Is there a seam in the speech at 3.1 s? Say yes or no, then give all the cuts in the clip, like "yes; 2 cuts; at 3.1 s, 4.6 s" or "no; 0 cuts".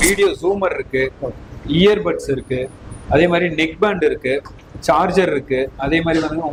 no; 0 cuts